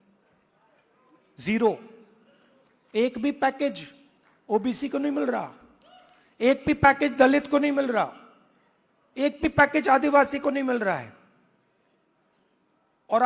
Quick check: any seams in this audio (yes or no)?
no